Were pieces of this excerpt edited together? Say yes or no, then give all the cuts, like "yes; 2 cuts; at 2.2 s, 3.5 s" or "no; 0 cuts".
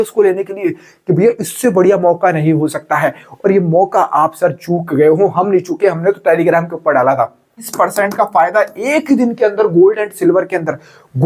yes; 1 cut; at 7.7 s